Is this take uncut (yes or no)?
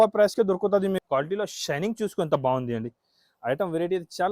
no